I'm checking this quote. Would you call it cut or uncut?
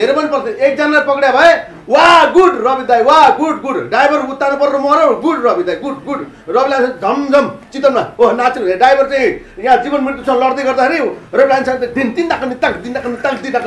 uncut